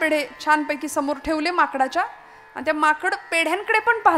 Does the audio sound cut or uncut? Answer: uncut